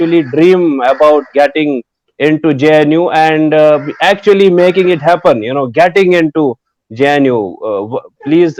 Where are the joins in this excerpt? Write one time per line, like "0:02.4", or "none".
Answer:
none

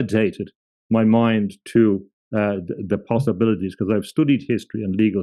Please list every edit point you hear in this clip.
none

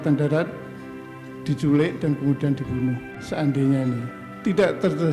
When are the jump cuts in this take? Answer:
0:03.2

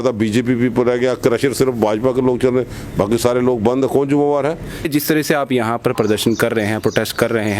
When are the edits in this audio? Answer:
0:04.9

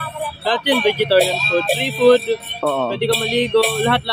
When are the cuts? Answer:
none

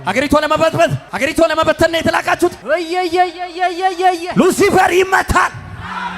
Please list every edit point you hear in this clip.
0:01.0
0:02.6

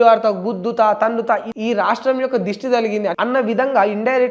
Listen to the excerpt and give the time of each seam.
0:01.5
0:03.1

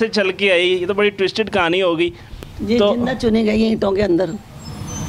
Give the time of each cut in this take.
none

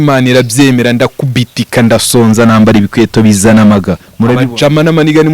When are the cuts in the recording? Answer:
0:04.4

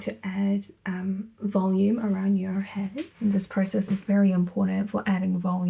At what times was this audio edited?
0:03.1

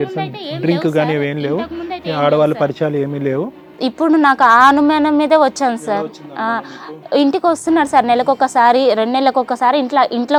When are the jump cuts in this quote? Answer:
none

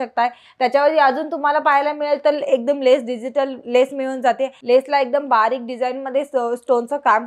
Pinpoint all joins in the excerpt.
0:04.5

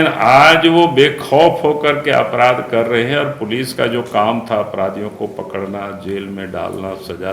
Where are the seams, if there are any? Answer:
none

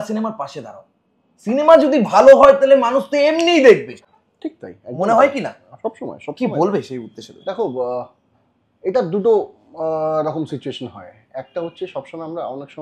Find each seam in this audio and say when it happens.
none

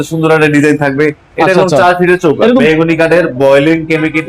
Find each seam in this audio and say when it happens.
0:02.5

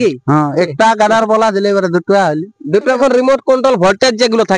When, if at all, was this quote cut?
0:03.0

